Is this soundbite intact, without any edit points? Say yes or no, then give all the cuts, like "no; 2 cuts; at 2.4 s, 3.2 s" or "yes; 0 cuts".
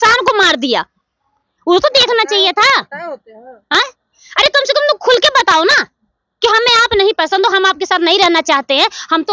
yes; 0 cuts